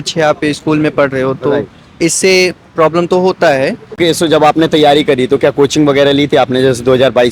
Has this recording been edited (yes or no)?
yes